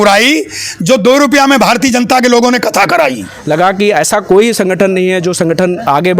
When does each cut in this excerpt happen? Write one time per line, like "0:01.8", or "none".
0:03.3